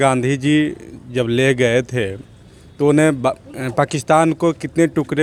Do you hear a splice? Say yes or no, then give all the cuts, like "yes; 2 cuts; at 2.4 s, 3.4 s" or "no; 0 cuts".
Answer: no; 0 cuts